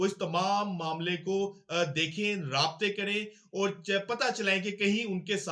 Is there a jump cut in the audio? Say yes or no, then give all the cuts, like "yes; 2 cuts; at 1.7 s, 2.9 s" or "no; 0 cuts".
no; 0 cuts